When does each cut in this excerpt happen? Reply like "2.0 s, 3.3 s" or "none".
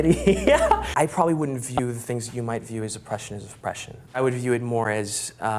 0.9 s, 3.9 s

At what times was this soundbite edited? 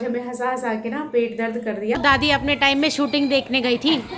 2.0 s

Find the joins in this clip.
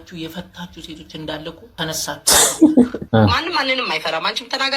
1.6 s, 3.0 s

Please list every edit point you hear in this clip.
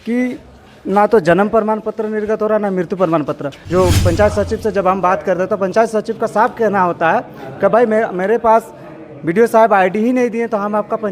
3.5 s

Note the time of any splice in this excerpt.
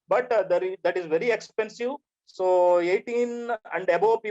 2.2 s

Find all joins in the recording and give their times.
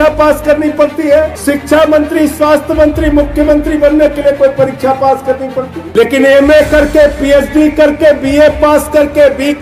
1.4 s, 5.8 s

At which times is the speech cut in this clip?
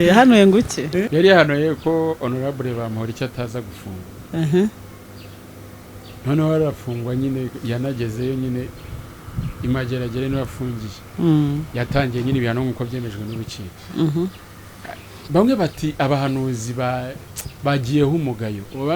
1.1 s

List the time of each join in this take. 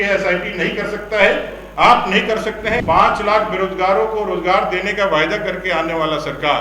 2.8 s

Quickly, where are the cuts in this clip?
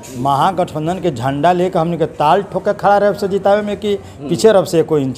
none

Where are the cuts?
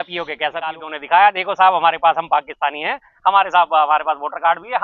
0.9 s

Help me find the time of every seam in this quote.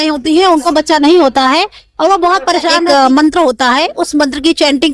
2.8 s

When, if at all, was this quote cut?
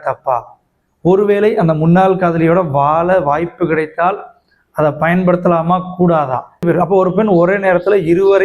6.6 s

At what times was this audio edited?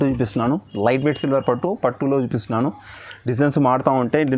none

